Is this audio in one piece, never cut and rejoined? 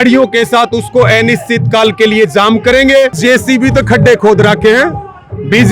no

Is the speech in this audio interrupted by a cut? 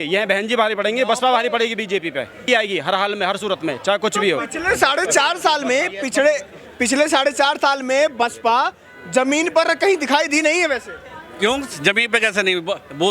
no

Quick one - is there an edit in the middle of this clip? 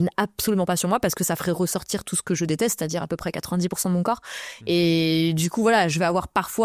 no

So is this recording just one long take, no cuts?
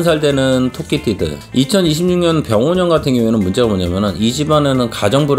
yes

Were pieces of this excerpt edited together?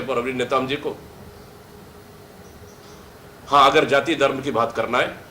yes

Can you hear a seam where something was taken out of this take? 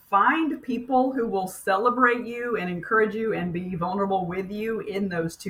no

